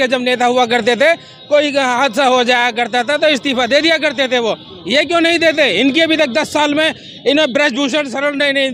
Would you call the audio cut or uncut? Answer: uncut